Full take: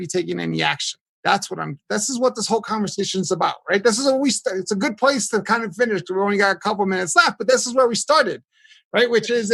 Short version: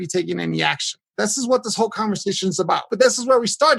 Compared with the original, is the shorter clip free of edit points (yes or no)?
no